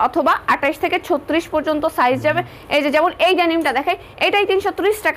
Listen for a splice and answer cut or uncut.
uncut